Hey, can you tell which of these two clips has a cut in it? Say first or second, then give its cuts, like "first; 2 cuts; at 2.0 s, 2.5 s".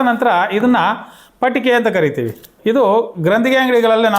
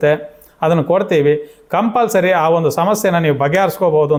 first; 1 cut; at 2.5 s